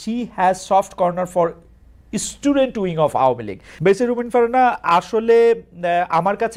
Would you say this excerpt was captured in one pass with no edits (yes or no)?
yes